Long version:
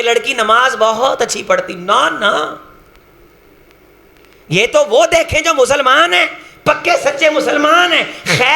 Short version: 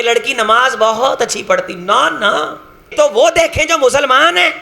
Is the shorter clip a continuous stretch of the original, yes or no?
no